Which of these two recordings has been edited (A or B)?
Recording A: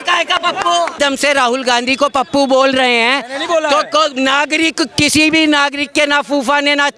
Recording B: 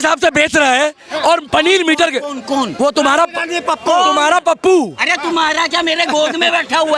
A